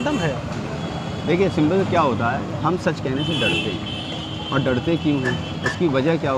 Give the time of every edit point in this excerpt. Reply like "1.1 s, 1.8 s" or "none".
none